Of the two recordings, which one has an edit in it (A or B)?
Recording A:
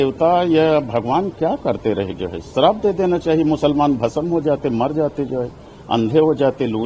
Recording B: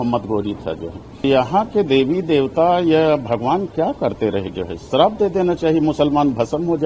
B